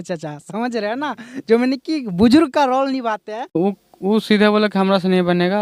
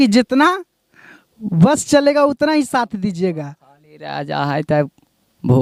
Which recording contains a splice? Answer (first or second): first